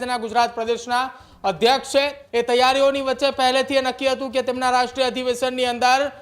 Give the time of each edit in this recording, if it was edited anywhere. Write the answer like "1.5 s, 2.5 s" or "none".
2.2 s